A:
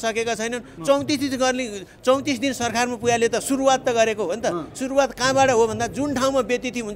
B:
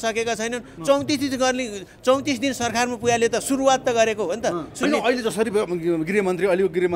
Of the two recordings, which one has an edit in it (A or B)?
B